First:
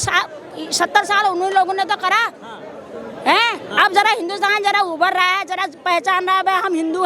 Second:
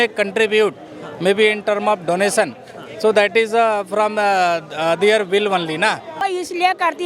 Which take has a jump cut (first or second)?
second